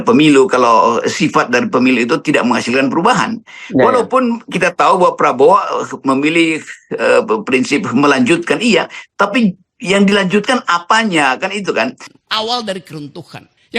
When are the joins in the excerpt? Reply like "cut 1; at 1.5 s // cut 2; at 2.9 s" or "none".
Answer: cut 1; at 12.0 s